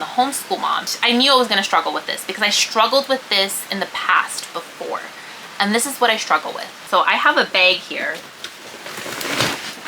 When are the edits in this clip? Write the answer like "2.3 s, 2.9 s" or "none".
0.9 s, 6.7 s